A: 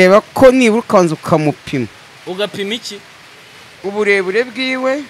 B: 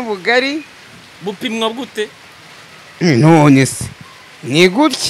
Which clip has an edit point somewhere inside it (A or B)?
B